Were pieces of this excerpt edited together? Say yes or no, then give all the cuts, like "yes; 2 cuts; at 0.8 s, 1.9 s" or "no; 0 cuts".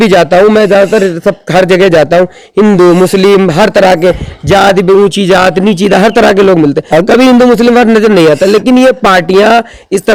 no; 0 cuts